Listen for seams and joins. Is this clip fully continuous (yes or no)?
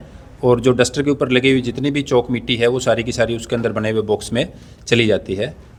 yes